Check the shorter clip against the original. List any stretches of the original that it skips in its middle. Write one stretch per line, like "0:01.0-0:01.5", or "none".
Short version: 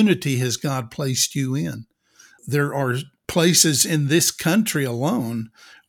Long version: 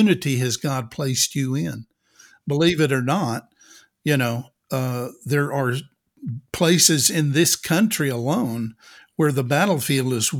0:02.4-0:05.1
0:05.9-0:06.4